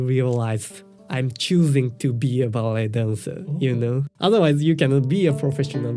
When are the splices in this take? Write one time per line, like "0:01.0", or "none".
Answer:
0:04.1

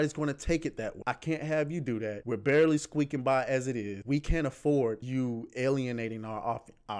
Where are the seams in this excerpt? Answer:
0:01.0
0:02.2
0:04.0
0:05.0

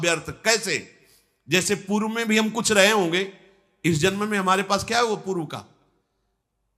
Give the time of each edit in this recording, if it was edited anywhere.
none

